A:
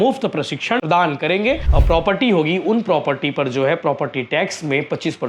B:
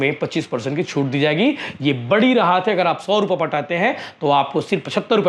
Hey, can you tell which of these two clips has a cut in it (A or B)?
A